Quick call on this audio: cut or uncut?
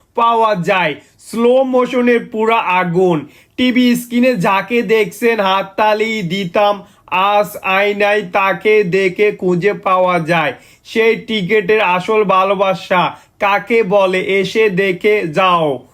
uncut